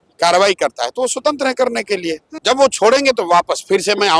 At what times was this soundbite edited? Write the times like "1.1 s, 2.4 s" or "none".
2.3 s